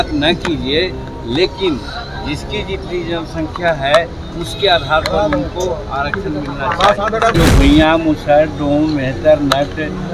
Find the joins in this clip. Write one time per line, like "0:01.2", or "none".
0:07.3